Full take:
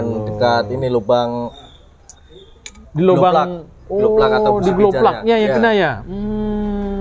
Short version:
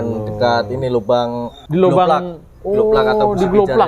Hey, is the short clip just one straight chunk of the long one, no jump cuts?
no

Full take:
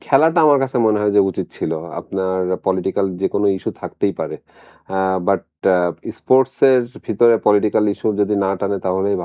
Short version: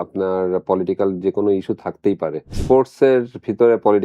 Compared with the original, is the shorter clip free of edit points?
no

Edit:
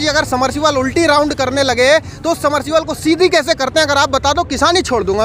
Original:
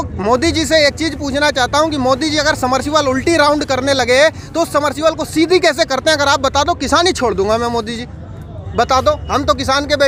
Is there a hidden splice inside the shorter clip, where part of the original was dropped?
no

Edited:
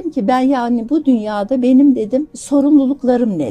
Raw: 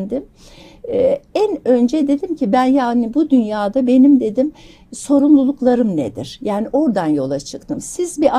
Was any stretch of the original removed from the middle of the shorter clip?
yes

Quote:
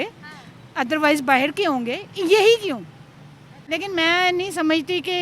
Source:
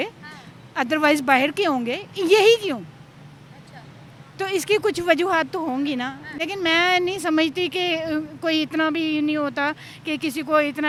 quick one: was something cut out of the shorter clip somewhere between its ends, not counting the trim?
yes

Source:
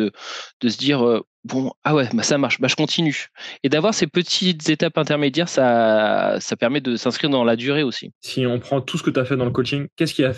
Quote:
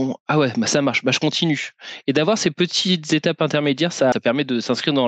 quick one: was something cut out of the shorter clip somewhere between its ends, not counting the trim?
yes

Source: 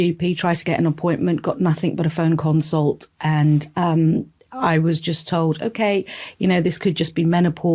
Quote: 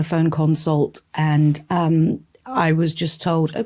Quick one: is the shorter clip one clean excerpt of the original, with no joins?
yes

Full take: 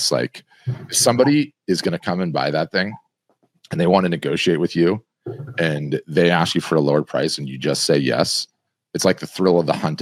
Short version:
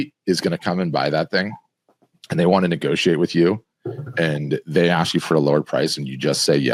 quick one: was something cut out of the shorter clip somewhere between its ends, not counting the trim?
no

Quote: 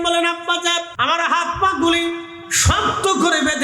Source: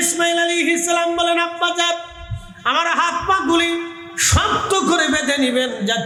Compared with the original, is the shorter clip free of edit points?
no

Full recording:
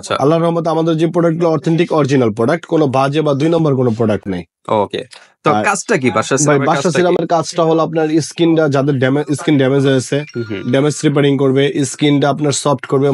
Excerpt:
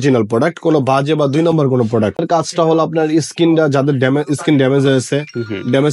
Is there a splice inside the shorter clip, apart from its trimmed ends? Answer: yes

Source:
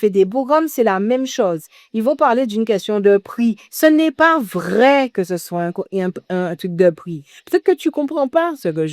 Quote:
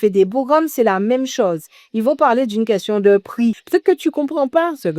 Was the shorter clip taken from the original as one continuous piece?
no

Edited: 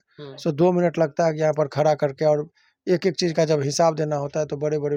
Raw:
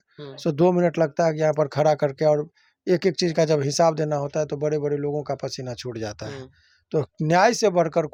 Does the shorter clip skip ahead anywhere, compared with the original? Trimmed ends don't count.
no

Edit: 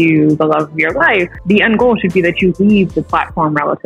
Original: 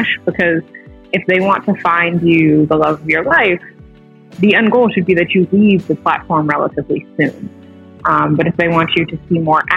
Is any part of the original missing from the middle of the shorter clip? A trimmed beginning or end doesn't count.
yes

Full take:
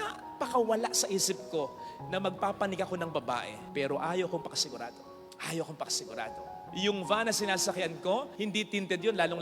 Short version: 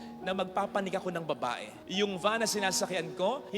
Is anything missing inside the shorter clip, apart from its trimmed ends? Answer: yes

